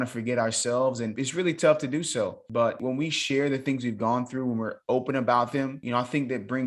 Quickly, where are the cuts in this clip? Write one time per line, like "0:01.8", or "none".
0:01.1
0:02.8
0:05.8